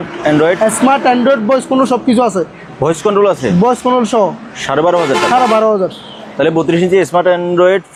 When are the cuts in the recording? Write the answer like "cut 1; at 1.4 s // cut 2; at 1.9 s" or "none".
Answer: none